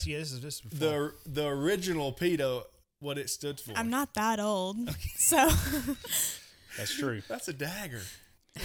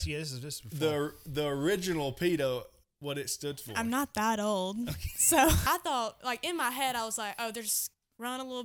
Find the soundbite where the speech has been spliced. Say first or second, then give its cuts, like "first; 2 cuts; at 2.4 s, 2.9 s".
second; 1 cut; at 5.7 s